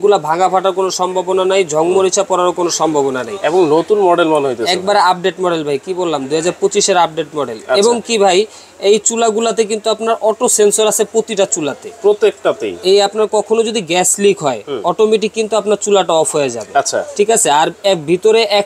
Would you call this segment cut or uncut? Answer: uncut